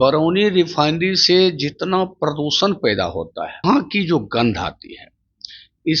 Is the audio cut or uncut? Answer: cut